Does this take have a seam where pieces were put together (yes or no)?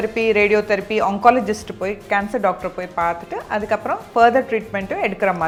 no